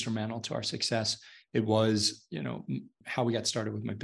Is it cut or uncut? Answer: cut